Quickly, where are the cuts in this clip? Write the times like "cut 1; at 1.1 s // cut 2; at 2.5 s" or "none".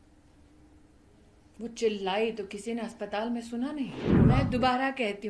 cut 1; at 4.1 s